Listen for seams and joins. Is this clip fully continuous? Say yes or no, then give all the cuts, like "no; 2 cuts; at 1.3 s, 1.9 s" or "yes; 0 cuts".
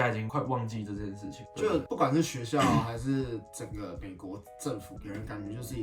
yes; 0 cuts